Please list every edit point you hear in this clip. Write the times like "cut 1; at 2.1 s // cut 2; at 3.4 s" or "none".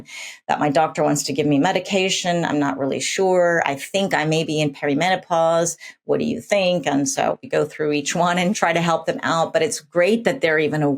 cut 1; at 7.5 s // cut 2; at 8.6 s